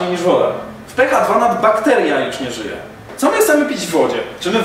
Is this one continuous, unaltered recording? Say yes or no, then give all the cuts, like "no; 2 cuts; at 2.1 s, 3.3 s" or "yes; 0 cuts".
no; 1 cut; at 3.0 s